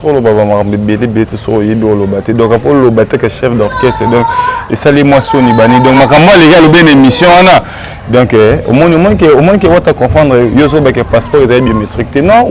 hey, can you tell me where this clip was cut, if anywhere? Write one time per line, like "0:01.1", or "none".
none